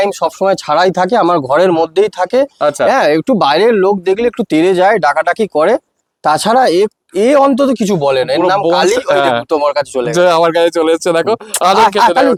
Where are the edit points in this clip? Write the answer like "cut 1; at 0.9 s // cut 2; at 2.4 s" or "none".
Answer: none